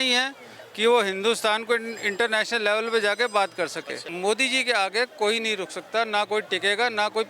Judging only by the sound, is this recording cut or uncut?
cut